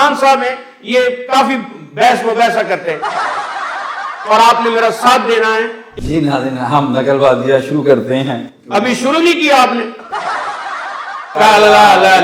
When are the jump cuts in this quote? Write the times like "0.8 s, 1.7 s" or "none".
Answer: 3.1 s, 4.2 s, 9.9 s, 11.3 s

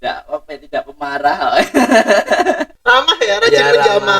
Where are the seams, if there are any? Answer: 2.8 s

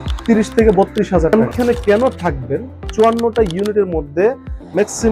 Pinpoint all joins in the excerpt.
1.5 s, 2.8 s

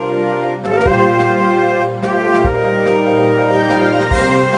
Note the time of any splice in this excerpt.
0.9 s

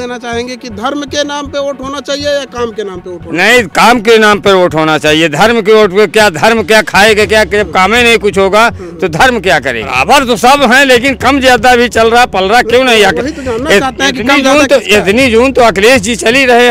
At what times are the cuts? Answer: 9.9 s

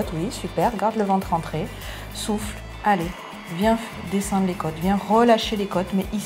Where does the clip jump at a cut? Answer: none

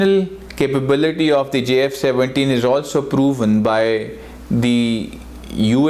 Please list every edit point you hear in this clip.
none

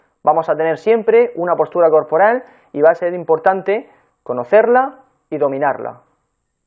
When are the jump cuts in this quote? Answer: none

